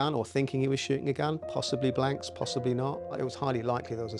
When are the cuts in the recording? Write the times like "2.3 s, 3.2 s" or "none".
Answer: 3.2 s